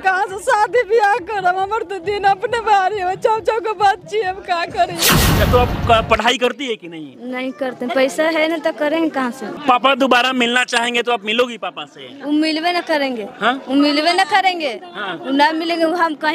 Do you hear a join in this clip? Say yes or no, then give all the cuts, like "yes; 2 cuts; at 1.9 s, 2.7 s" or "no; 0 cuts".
yes; 2 cuts; at 5.4 s, 9.6 s